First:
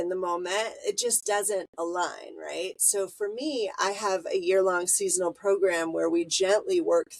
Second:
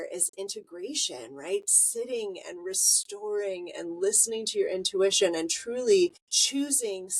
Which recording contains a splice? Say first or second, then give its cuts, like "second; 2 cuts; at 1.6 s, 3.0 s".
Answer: second; 1 cut; at 6.3 s